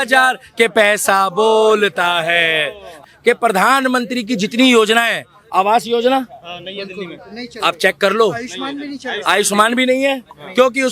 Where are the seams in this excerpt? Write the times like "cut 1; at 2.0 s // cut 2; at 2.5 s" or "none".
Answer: cut 1; at 3.0 s